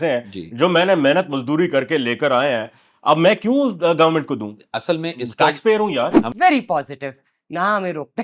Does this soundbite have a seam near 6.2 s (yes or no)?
yes